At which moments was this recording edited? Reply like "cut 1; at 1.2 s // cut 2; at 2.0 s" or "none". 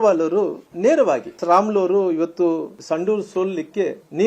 cut 1; at 1.3 s // cut 2; at 2.7 s